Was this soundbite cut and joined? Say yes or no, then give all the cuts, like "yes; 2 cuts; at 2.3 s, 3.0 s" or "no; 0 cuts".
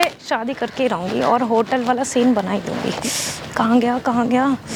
no; 0 cuts